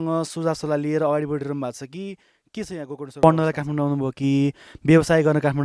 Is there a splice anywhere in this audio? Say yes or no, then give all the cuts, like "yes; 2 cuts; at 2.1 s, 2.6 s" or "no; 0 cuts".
yes; 1 cut; at 3.2 s